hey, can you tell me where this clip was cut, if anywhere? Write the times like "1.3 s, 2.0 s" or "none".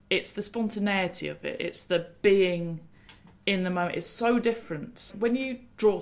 5.1 s